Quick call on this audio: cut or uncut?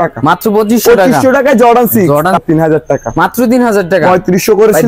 cut